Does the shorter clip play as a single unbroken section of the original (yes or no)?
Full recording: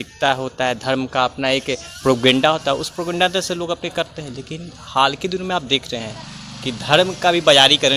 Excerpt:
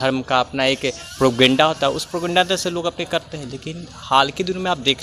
yes